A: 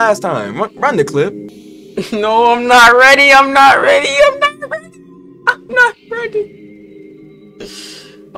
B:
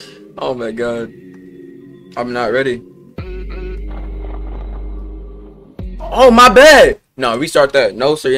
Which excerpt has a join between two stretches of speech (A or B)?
A